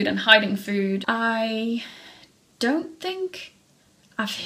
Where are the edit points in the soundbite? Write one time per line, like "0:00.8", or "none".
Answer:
0:01.0